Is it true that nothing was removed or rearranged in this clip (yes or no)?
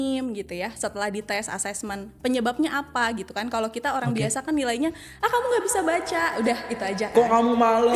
yes